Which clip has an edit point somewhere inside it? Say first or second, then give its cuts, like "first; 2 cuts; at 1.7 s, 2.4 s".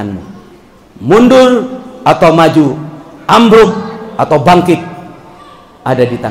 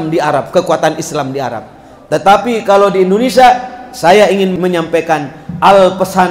second; 1 cut; at 4.5 s